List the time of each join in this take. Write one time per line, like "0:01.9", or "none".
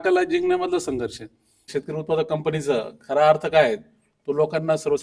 0:01.6